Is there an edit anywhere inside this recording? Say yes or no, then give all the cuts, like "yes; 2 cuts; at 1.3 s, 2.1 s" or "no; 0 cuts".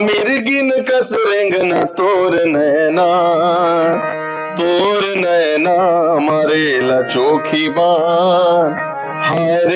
no; 0 cuts